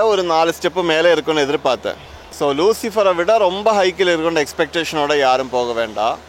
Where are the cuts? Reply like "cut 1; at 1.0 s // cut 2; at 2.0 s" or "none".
cut 1; at 2.2 s